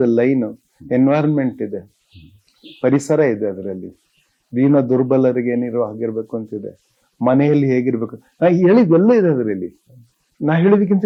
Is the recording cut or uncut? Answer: uncut